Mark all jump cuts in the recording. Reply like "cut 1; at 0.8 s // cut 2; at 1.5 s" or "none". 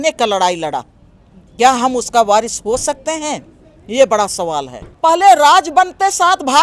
cut 1; at 4.8 s